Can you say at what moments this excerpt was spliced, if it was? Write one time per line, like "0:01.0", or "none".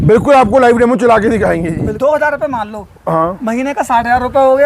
0:01.7